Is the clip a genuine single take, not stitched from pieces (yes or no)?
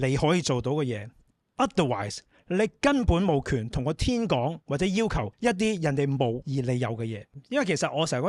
no